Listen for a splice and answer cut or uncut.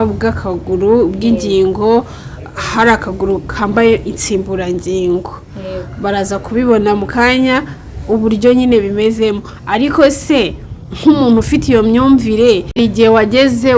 cut